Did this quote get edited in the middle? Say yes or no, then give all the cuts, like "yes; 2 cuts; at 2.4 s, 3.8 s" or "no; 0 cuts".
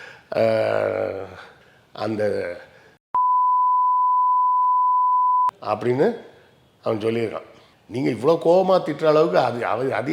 no; 0 cuts